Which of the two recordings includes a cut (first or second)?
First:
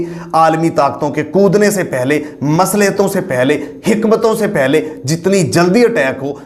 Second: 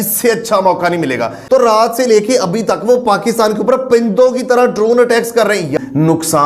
second